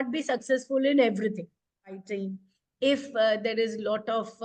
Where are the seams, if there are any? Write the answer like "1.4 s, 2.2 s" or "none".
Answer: 2.0 s